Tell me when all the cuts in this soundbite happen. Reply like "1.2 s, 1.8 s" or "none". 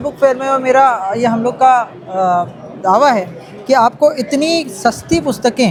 none